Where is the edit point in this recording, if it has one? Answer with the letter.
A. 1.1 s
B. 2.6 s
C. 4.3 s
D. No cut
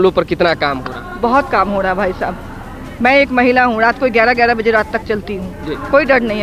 D